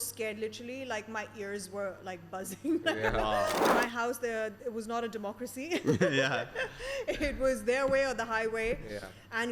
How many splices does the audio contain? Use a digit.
1